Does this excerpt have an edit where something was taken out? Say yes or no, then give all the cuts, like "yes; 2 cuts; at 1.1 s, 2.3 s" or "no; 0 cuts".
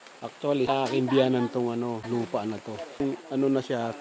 yes; 3 cuts; at 0.7 s, 2.0 s, 3.0 s